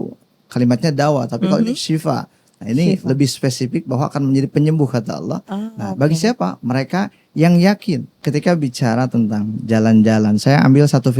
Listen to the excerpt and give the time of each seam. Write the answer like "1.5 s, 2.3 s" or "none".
8.2 s